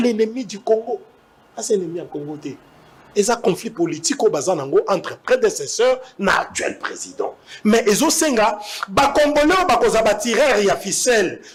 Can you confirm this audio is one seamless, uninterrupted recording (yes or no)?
yes